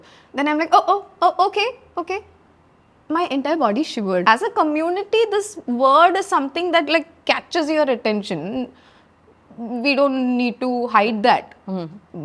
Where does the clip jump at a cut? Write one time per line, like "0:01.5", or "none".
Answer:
0:04.2